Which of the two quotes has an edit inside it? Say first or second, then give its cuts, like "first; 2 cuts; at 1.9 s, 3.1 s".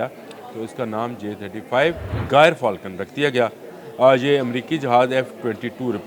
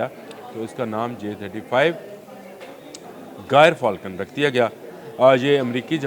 first; 1 cut; at 2.1 s